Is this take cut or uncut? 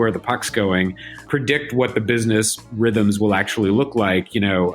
cut